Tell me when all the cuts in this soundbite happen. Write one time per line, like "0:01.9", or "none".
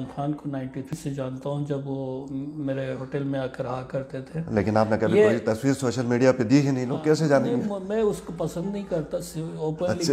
0:01.0